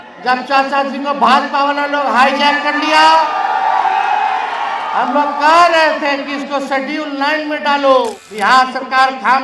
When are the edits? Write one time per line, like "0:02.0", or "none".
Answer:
0:08.2